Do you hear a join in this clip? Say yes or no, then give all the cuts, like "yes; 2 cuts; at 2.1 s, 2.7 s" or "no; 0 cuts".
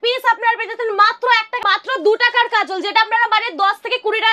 yes; 1 cut; at 1.6 s